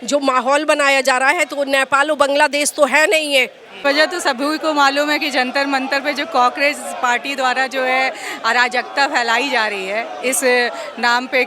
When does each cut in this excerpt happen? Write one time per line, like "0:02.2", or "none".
0:03.8